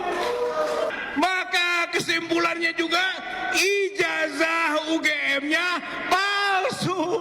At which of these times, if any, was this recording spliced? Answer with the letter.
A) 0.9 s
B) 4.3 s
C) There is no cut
A